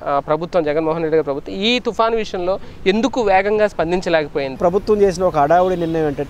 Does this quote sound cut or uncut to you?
cut